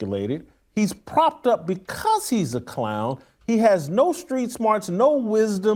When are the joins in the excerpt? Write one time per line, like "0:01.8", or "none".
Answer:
none